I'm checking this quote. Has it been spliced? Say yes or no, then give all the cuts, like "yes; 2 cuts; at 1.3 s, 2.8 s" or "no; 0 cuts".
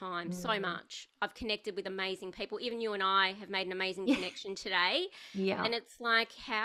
no; 0 cuts